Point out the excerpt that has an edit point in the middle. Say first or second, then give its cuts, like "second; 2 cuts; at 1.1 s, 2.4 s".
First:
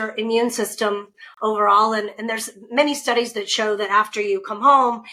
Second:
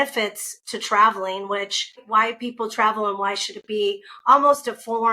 second; 1 cut; at 2.0 s